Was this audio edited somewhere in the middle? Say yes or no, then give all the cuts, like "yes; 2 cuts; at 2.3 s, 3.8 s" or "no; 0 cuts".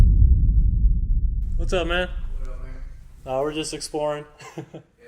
yes; 1 cut; at 1.2 s